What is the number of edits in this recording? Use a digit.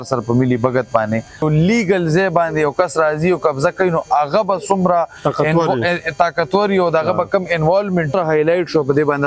2